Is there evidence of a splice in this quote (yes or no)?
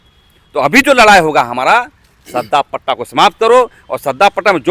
no